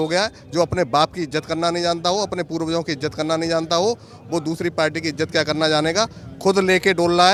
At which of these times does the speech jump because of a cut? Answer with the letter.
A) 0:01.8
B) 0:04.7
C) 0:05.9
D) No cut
D